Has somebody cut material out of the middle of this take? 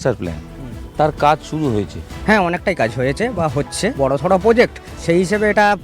yes; 3 cuts; at 2.0 s, 3.9 s, 4.9 s

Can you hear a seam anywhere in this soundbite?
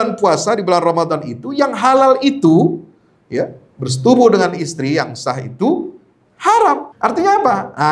yes; 1 cut; at 6.9 s

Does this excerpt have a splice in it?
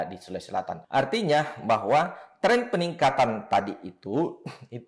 no; 0 cuts

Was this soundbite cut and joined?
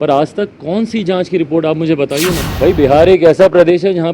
yes; 1 cut; at 2.4 s

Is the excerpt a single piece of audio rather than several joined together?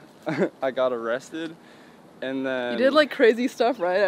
yes; 0 cuts

